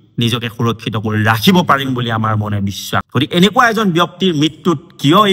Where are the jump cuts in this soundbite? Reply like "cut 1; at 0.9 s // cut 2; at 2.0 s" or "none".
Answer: cut 1; at 3.1 s